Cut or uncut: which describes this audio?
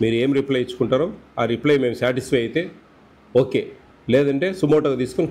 uncut